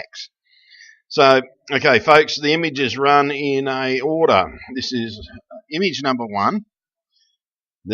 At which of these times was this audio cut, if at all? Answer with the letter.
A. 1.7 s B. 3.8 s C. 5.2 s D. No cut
B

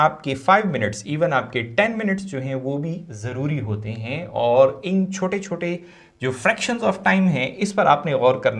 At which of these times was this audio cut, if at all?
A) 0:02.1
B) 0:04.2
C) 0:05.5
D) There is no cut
D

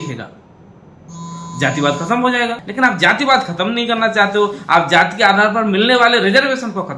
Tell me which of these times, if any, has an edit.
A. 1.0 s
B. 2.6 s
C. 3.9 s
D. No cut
B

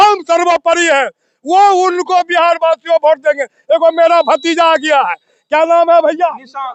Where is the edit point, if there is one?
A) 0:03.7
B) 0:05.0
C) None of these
C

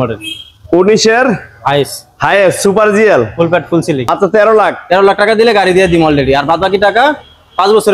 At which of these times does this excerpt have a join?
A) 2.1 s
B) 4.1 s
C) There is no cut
B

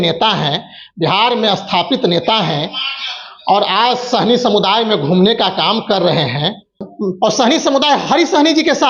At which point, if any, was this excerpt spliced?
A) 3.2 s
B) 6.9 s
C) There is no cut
B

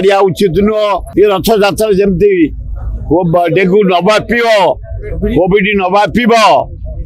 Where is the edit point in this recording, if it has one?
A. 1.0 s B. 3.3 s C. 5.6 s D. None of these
A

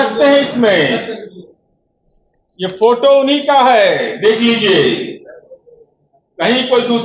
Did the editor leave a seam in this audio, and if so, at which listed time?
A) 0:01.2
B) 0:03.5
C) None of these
C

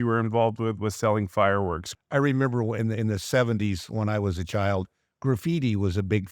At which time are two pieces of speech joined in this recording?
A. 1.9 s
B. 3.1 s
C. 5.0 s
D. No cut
A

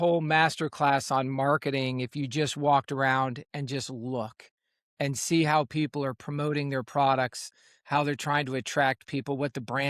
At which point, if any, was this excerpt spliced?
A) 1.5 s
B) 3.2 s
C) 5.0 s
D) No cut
D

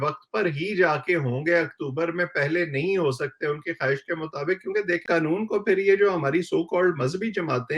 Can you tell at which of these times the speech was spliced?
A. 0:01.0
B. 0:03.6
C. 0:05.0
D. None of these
C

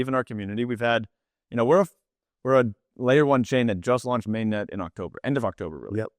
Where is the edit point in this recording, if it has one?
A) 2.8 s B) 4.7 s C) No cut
C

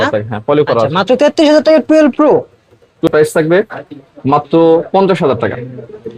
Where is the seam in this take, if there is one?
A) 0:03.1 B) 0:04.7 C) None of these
A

